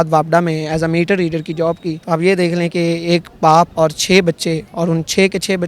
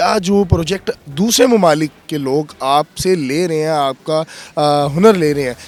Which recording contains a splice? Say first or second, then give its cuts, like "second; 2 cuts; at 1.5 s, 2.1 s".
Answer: first; 2 cuts; at 1.9 s, 3.7 s